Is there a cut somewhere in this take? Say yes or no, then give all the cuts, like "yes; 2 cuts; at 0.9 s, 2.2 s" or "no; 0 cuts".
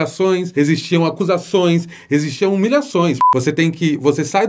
yes; 1 cut; at 3.3 s